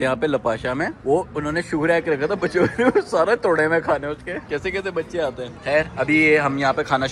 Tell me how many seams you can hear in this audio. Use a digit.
0